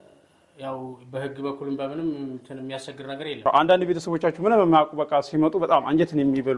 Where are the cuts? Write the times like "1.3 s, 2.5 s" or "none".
3.4 s